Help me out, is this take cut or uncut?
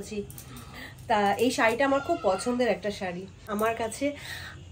cut